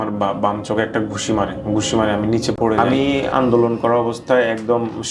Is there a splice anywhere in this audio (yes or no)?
yes